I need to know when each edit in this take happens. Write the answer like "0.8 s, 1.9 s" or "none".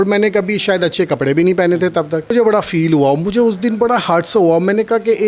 2.3 s